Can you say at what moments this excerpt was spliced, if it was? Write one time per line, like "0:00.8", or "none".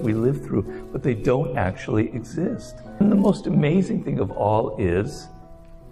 0:03.0